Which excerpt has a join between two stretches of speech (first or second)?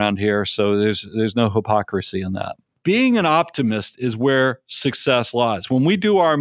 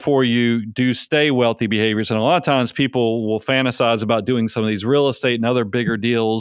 first